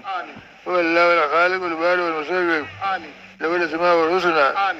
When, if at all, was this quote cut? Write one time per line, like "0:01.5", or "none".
none